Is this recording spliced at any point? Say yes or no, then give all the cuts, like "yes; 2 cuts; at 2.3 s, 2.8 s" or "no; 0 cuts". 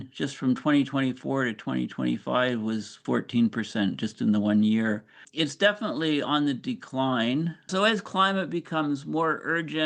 yes; 1 cut; at 7.6 s